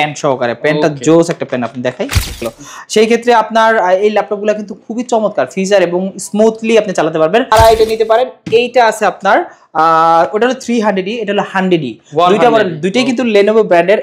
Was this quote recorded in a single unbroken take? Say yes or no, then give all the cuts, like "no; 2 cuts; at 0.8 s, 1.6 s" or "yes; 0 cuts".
no; 2 cuts; at 2.4 s, 7.5 s